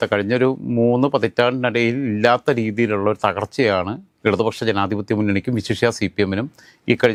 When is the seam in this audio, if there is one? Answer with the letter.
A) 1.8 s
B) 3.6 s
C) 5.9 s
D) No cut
D